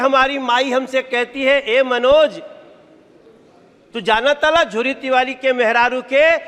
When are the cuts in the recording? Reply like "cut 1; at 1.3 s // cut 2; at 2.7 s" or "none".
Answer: none